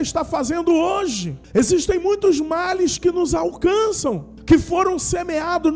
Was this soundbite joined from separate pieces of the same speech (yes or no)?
yes